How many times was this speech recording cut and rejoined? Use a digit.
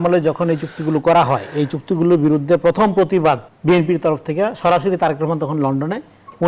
1